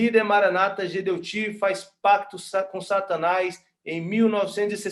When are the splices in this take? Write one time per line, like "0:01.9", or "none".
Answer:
none